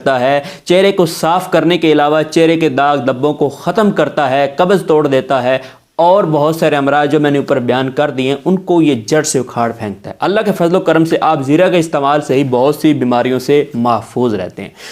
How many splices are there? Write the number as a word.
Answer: zero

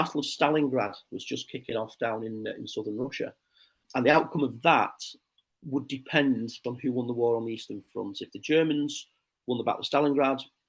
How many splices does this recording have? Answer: one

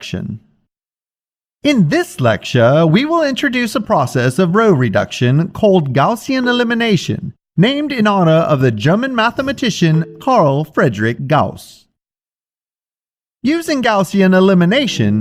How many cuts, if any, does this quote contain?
zero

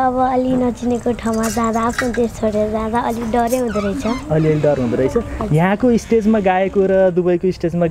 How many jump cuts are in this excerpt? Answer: zero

